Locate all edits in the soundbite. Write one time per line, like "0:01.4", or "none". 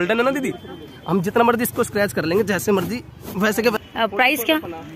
0:03.7

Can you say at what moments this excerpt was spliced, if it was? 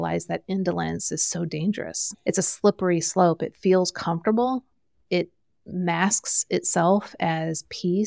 0:02.2

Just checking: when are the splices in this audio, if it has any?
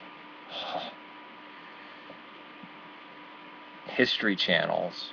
0:03.7

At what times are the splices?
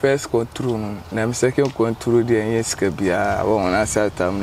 0:01.0

